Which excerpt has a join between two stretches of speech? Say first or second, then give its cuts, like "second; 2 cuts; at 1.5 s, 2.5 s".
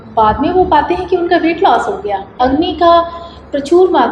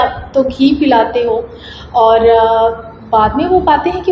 first; 1 cut; at 2.4 s